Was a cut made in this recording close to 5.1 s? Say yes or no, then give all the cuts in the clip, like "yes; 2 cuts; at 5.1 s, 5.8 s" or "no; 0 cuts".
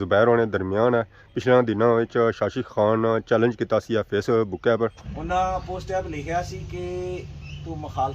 yes; 1 cut; at 5.1 s